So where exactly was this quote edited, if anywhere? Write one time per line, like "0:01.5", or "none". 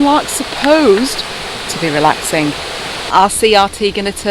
0:03.0